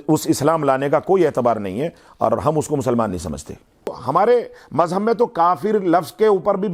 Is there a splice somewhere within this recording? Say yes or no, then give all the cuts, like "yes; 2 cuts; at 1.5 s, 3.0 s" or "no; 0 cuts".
yes; 1 cut; at 4.0 s